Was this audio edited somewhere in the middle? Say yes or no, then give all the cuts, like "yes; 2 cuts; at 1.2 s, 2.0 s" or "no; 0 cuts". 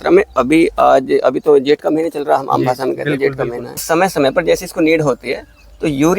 yes; 1 cut; at 3.8 s